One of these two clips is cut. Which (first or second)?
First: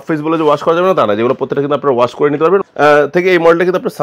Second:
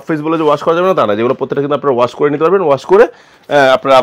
first